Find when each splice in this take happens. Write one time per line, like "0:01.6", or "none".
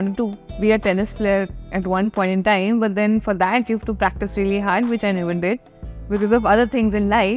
none